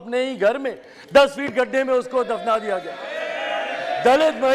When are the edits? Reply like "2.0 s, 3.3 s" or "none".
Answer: none